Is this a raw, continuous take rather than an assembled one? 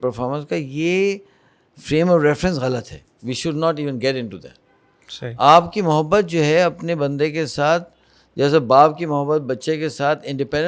yes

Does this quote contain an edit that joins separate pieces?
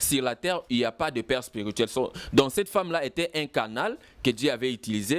no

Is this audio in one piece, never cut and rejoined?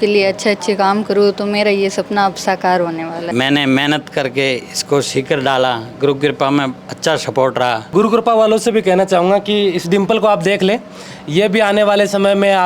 no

